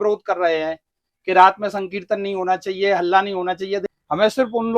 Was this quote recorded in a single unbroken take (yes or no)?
no